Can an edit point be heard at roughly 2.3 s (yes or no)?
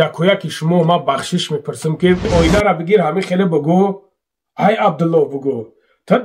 yes